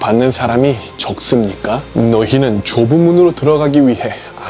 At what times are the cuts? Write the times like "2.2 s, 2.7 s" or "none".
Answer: 1.8 s